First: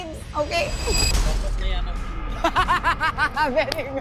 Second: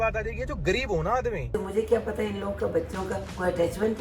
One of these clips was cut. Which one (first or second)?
second